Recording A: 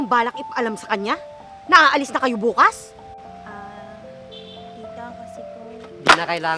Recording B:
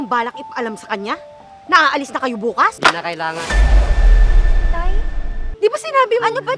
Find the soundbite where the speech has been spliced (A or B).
B